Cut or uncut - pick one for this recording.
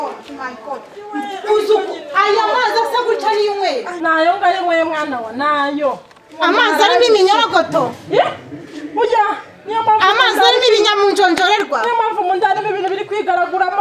uncut